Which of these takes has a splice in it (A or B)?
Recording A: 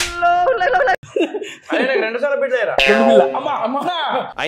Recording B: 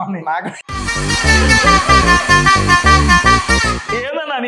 A